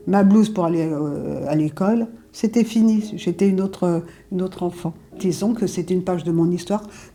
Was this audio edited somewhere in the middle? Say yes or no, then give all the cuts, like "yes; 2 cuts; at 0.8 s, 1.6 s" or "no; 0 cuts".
no; 0 cuts